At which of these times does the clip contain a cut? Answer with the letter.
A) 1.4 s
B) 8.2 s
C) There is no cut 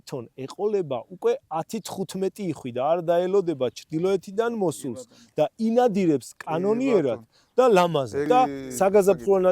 B